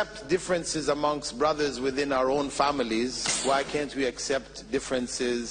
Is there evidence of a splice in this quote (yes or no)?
yes